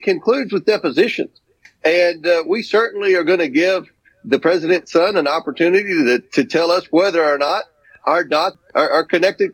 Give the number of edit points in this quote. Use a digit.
1